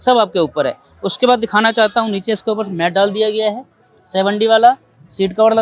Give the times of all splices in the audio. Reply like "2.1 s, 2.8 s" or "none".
none